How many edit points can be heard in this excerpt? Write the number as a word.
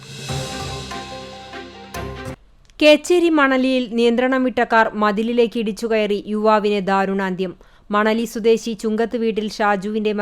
one